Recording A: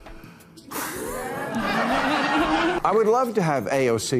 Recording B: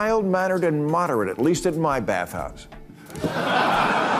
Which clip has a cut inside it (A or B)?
A